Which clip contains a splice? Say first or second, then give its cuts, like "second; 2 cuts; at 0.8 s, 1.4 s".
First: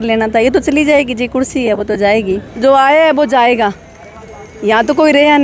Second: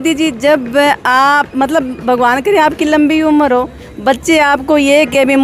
first; 1 cut; at 2.5 s